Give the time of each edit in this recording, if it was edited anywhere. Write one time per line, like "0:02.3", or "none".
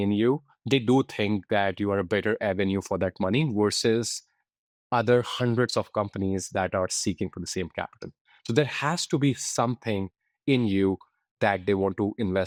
none